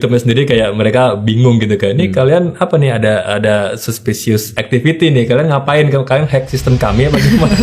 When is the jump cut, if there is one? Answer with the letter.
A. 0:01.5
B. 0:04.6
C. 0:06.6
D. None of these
B